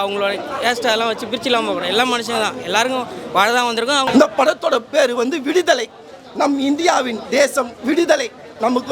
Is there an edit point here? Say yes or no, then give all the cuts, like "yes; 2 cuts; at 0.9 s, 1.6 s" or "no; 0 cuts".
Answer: yes; 1 cut; at 4.1 s